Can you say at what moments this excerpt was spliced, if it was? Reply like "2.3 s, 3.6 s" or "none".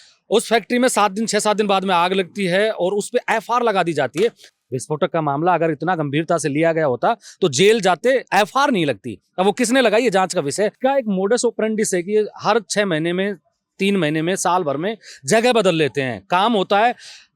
4.4 s, 10.8 s